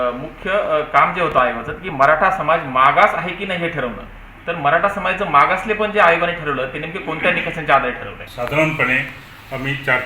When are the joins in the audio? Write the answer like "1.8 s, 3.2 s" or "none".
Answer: 8.2 s